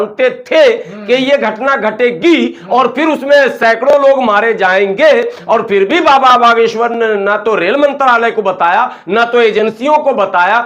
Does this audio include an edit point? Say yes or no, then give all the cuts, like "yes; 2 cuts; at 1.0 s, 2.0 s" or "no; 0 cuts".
no; 0 cuts